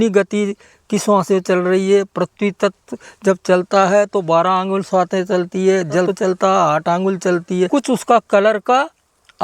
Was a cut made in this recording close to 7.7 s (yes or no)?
yes